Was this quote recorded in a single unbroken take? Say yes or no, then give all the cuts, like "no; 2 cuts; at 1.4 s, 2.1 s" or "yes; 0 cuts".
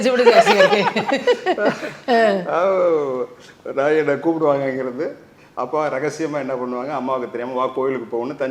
yes; 0 cuts